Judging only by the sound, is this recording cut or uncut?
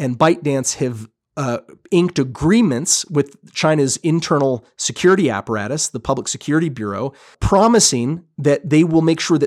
cut